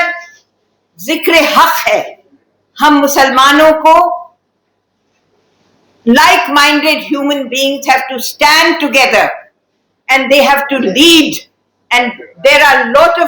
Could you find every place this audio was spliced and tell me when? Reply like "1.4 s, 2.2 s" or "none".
none